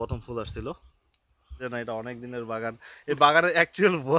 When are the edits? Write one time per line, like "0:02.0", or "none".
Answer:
0:01.6

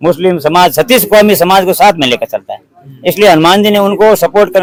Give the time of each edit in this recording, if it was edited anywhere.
none

